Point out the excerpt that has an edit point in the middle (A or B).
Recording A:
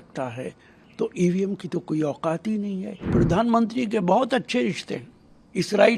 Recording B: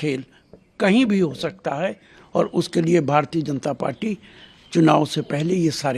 A